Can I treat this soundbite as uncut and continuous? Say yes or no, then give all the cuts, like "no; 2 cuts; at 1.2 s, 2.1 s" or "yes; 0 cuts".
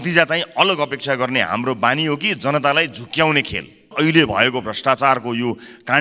no; 1 cut; at 3.9 s